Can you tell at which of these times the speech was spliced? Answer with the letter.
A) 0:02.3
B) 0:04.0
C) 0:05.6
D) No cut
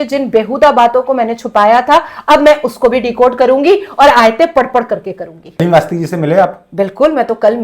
C